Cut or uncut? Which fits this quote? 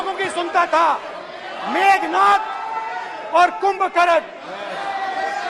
uncut